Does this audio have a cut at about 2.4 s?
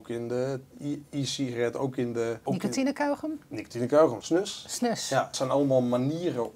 yes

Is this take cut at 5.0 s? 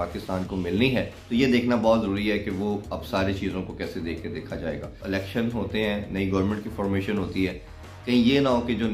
yes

